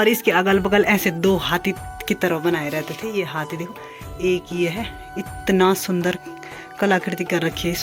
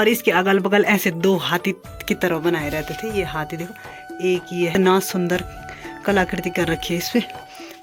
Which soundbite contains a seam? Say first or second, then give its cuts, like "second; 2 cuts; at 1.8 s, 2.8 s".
second; 1 cut; at 4.7 s